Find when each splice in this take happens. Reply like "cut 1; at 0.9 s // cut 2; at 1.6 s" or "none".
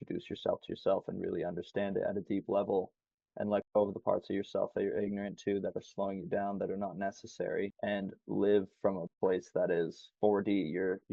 cut 1; at 7.7 s // cut 2; at 10.0 s